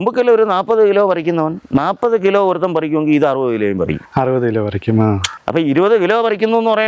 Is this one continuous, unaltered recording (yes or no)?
yes